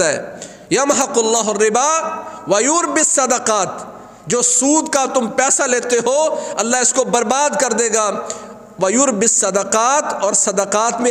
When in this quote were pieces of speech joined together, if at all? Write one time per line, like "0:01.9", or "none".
none

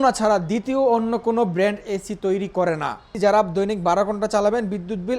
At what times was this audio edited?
0:03.1

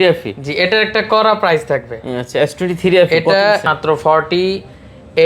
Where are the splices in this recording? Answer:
0:03.7

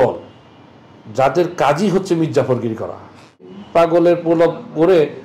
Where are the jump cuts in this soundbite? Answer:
0:03.8

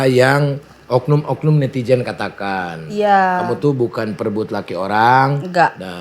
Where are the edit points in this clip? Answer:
none

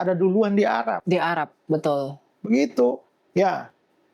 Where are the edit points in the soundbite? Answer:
none

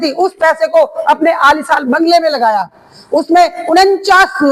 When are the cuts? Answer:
none

